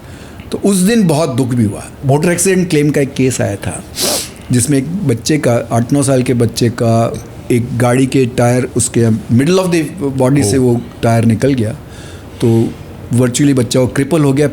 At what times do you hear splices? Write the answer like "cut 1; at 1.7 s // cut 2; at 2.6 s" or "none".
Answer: cut 1; at 1.9 s